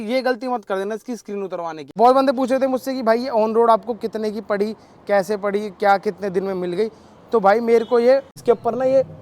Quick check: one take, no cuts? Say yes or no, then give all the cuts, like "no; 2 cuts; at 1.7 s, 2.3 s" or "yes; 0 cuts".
no; 2 cuts; at 1.9 s, 8.3 s